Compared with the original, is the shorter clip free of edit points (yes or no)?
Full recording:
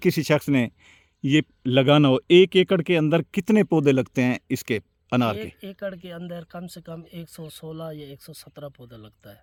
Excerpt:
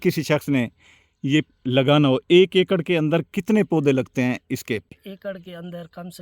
no